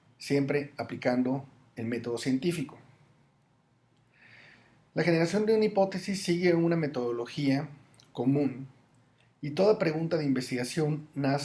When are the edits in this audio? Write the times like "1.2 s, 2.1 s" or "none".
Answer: none

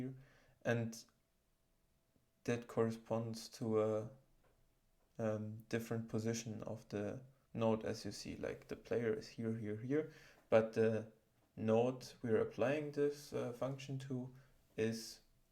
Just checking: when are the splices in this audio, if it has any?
7.3 s

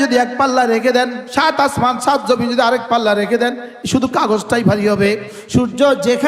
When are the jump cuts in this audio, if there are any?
1.2 s, 5.3 s

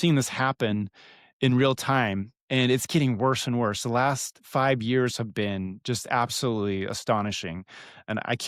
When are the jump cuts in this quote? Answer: none

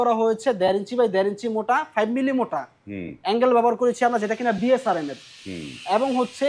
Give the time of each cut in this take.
none

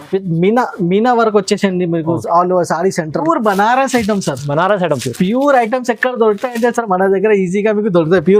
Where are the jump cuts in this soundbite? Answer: 3.2 s

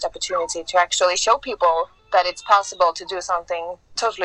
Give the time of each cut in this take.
none

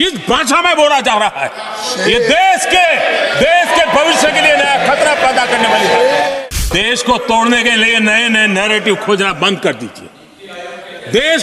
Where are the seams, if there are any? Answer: 6.4 s

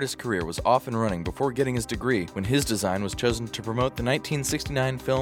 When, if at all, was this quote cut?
2.3 s

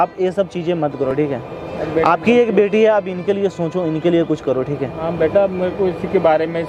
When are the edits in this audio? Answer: none

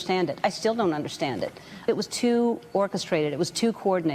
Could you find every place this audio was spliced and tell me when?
none

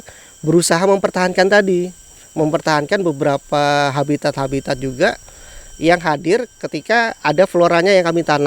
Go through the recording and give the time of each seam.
none

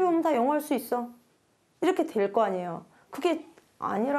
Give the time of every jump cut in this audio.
none

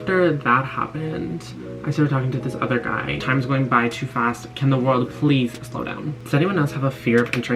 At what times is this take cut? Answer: 3.2 s, 6.1 s

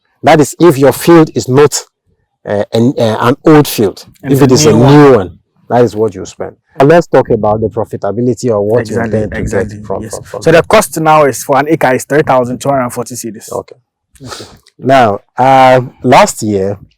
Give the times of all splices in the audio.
6.8 s

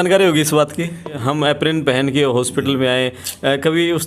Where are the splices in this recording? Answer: 1.1 s

